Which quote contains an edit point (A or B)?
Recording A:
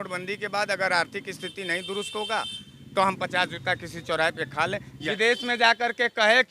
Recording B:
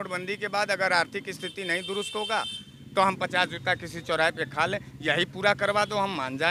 A